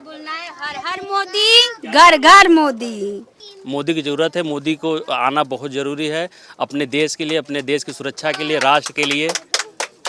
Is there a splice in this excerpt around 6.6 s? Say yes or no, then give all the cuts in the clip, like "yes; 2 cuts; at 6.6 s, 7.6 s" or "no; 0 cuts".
no; 1 cut; at 3.3 s